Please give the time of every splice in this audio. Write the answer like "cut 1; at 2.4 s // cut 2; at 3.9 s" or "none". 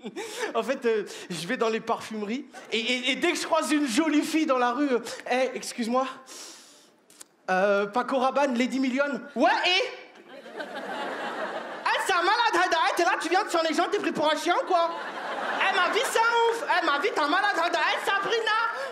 cut 1; at 2.5 s